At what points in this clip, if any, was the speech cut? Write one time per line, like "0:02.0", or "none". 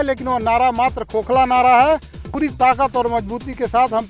0:02.3

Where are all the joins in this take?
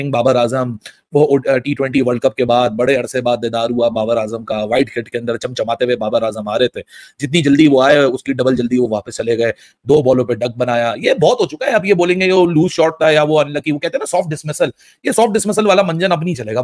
none

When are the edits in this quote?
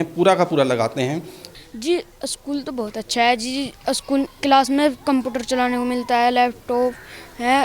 0:01.4

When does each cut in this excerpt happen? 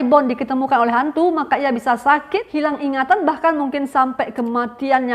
0:02.5

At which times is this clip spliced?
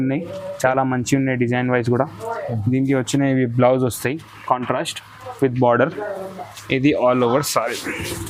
none

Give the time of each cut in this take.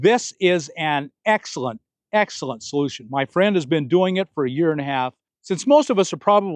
0:05.3

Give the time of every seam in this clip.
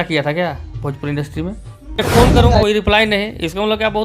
0:02.1

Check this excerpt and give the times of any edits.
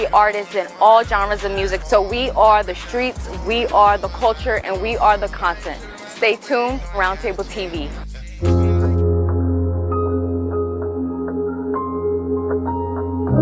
none

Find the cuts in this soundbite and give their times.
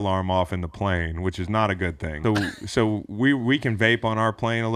0:02.1

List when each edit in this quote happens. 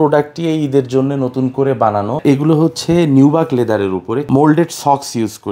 0:02.2
0:04.2

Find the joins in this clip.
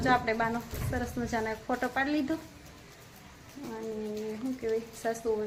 none

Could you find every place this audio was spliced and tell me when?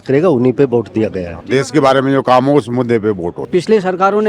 0:01.4
0:03.4

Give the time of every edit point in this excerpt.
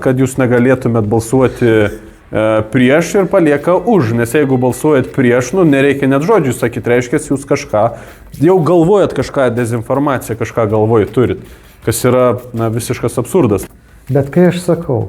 0:13.6

